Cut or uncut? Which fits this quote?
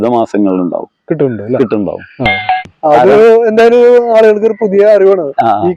cut